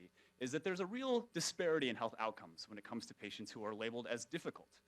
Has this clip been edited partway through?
yes; 1 cut; at 1.1 s

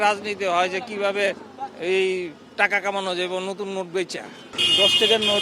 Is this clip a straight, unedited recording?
yes; 0 cuts

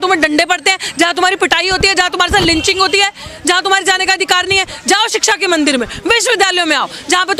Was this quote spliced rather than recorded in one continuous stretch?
no; 0 cuts

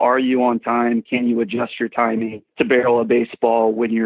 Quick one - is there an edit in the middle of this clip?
yes; 1 cut; at 2.4 s

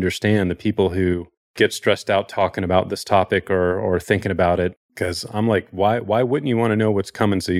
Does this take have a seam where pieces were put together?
no; 0 cuts

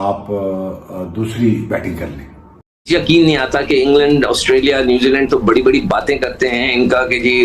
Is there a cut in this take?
yes; 1 cut; at 2.9 s

